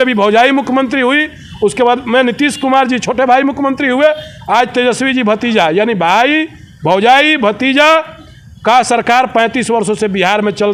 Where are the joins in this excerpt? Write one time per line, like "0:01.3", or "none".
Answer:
none